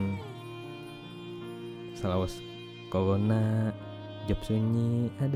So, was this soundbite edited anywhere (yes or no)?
no